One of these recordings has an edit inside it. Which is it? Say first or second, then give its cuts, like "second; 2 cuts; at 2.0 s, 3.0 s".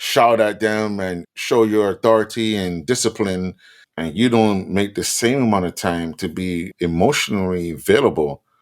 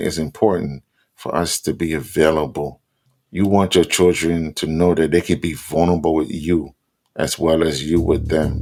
first; 1 cut; at 6.7 s